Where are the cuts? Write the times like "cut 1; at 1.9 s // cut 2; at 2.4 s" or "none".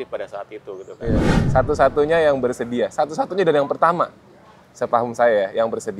cut 1; at 1.3 s